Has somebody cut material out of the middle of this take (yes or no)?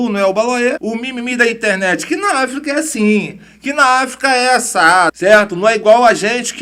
yes